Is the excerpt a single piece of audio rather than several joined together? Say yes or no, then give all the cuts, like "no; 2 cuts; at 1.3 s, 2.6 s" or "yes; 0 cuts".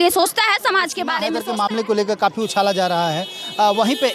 no; 1 cut; at 1.2 s